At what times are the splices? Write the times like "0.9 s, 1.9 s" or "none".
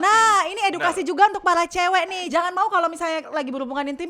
2.2 s